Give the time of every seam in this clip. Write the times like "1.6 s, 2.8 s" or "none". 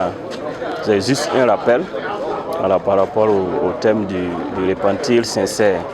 none